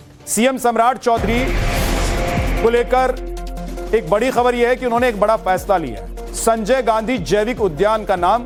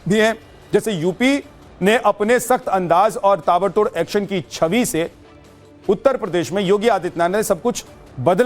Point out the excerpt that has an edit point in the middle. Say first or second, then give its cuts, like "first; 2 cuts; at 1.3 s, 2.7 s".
second; 1 cut; at 6.0 s